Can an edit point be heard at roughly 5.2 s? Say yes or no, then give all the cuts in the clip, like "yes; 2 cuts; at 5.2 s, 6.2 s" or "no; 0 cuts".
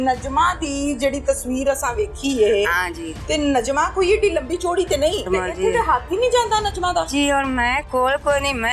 yes; 1 cut; at 5.2 s